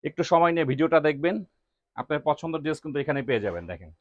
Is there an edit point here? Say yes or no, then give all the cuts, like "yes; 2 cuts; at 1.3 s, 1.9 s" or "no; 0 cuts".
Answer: no; 0 cuts